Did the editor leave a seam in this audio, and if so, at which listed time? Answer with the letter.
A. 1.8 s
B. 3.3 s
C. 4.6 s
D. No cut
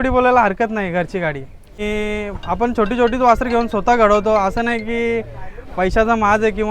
A